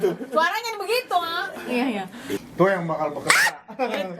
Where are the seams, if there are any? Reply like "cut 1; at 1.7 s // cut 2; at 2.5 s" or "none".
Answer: cut 1; at 2.4 s